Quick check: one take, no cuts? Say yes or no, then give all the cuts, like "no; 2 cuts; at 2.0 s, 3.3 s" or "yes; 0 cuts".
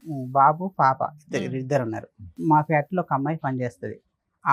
no; 1 cut; at 2.4 s